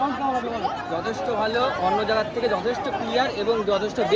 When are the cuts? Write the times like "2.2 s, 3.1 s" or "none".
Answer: none